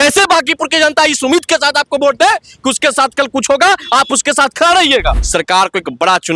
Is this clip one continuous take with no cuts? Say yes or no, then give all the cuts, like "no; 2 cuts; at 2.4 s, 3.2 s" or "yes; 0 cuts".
no; 1 cut; at 5.2 s